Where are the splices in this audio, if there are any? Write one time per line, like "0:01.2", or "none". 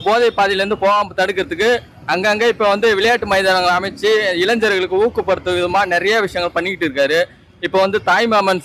none